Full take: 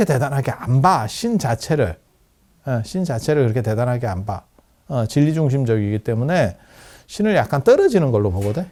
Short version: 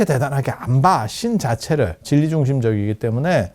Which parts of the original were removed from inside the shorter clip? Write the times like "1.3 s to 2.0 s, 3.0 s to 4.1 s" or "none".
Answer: 2.0 s to 5.1 s